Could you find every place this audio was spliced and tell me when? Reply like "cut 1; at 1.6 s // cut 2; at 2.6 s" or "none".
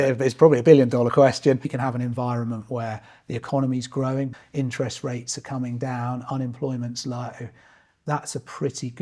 cut 1; at 1.8 s // cut 2; at 4.3 s